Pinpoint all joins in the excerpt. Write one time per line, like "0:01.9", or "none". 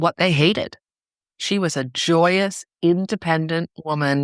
0:01.4